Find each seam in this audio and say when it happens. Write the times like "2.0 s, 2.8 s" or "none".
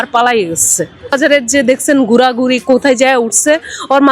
1.2 s